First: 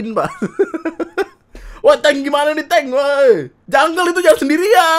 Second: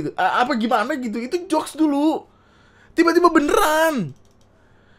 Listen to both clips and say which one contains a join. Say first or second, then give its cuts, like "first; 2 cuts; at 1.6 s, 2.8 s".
first; 1 cut; at 3.5 s